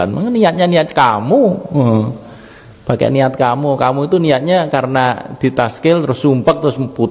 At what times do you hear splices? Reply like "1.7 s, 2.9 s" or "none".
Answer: none